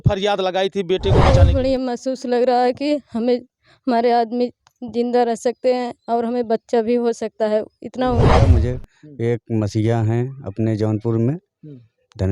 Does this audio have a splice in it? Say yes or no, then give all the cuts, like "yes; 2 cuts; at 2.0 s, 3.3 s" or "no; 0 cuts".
yes; 2 cuts; at 1.3 s, 8.3 s